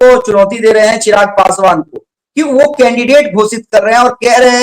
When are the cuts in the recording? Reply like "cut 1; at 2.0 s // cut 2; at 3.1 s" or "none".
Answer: none